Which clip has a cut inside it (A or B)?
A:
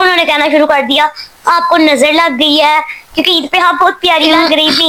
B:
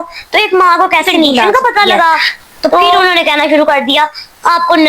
B